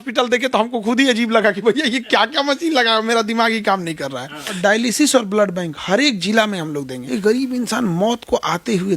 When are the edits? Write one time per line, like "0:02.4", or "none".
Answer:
0:04.5
0:07.0